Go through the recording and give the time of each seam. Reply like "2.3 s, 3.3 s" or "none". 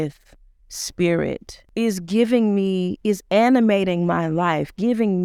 1.5 s